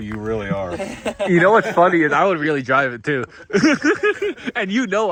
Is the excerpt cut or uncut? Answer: uncut